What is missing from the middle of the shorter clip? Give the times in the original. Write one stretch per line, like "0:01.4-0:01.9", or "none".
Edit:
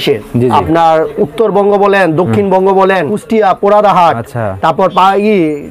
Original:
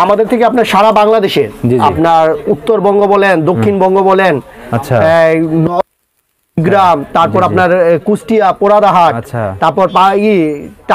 0:04.4-0:08.1